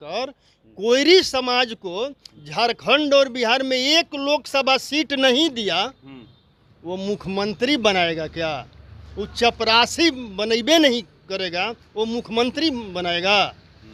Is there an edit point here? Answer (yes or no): no